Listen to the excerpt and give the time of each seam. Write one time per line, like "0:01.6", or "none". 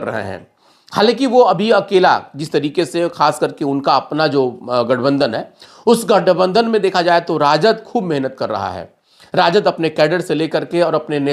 none